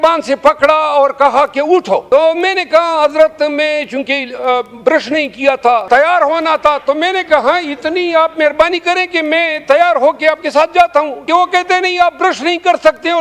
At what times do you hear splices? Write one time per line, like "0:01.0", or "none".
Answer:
0:02.0
0:05.8
0:11.2